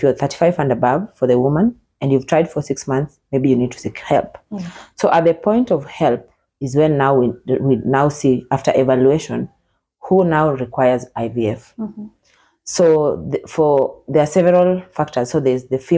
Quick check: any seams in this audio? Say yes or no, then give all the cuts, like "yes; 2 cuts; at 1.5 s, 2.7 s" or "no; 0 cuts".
no; 0 cuts